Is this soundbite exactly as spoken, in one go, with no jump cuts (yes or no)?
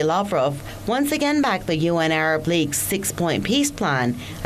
no